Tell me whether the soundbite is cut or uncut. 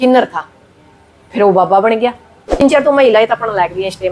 cut